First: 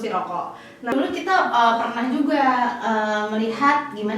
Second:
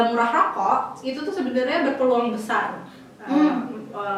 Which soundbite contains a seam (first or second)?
first